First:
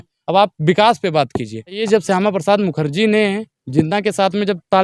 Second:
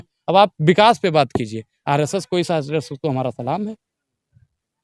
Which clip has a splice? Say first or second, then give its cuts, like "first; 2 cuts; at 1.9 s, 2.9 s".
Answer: first; 1 cut; at 1.9 s